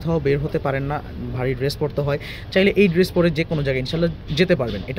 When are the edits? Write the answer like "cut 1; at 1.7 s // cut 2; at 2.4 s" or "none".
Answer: none